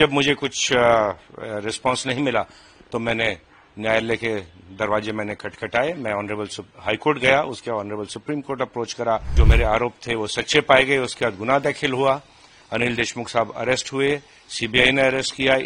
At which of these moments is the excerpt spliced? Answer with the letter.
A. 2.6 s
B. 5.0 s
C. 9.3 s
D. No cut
C